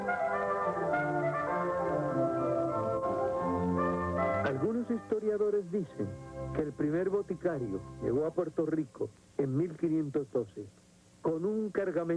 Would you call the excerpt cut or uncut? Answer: cut